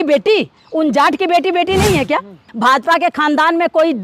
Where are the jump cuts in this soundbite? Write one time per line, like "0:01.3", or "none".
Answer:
0:02.4